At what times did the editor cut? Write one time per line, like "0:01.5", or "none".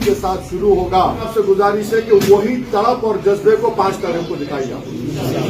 0:01.2